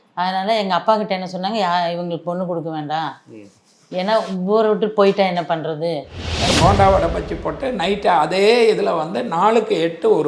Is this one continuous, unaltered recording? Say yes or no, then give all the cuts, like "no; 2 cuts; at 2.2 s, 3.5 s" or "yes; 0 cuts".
no; 1 cut; at 6.4 s